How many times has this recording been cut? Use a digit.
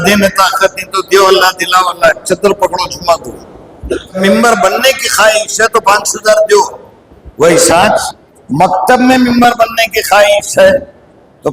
1